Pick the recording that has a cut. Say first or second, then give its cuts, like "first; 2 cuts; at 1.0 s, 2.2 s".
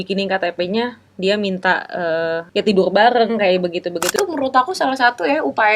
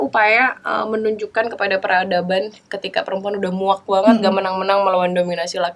first; 2 cuts; at 2.4 s, 4.1 s